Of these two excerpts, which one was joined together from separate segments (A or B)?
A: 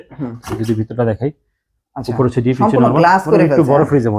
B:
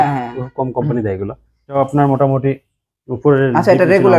B